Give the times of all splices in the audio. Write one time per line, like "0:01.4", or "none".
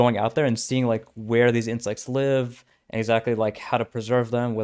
none